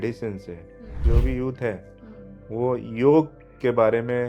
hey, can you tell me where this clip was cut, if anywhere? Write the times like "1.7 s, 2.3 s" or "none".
1.0 s